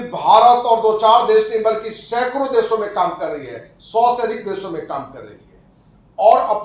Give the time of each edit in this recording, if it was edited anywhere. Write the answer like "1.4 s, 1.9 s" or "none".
none